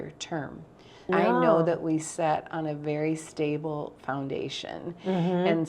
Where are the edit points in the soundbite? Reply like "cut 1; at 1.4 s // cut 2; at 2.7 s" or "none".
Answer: cut 1; at 1.0 s